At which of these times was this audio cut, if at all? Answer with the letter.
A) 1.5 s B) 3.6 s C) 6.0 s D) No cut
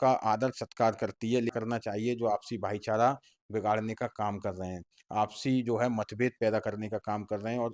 A